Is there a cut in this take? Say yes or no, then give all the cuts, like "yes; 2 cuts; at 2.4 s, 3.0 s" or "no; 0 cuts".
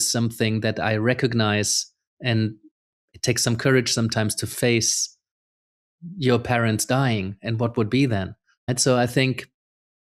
yes; 1 cut; at 8.5 s